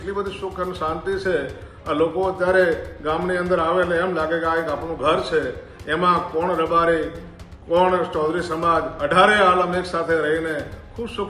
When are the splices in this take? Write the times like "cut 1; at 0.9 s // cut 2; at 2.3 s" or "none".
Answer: none